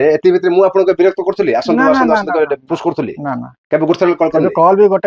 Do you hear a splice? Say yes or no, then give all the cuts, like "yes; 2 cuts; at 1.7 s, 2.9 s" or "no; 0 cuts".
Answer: no; 0 cuts